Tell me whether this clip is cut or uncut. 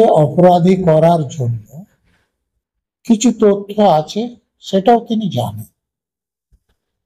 uncut